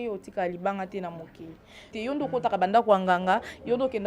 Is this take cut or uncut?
cut